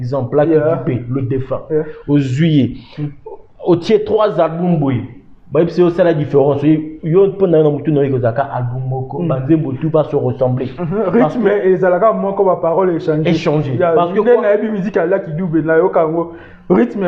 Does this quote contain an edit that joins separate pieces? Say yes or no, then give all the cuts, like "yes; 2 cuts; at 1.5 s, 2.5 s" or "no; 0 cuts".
no; 0 cuts